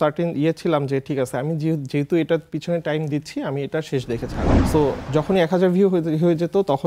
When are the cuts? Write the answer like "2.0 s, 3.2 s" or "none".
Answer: 4.6 s

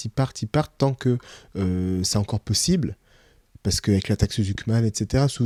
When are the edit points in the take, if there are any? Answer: none

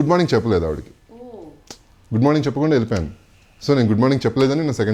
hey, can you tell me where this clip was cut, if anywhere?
none

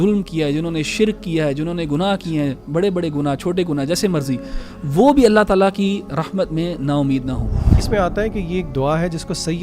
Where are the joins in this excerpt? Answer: 7.8 s

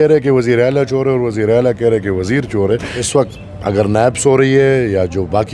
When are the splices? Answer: 2.9 s

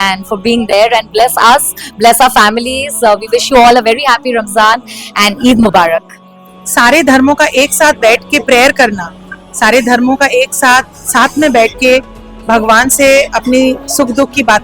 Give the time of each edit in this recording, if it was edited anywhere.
6.4 s

